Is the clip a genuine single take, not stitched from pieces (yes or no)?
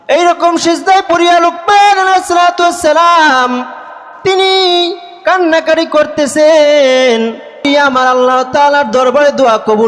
no